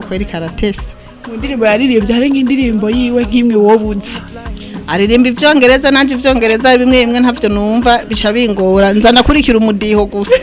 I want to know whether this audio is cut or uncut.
uncut